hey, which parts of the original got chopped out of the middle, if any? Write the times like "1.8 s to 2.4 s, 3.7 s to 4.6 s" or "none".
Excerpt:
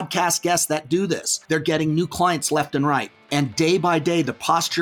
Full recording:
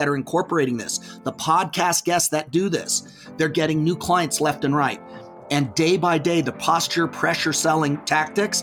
2.9 s to 3.2 s, 5.1 s to 5.4 s